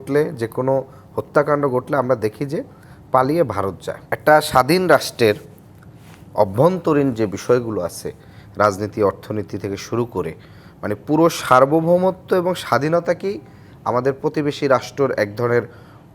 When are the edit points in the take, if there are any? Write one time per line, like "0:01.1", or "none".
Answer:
0:03.9